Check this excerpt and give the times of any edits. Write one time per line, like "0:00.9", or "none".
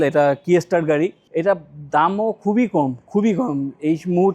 0:01.2